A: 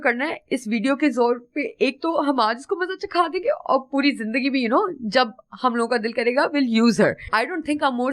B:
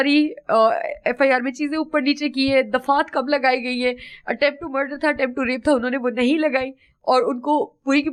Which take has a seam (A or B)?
A